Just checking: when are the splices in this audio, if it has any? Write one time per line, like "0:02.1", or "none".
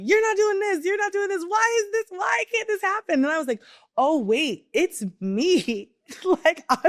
none